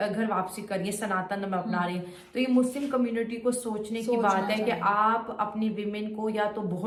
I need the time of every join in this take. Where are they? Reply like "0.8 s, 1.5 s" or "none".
none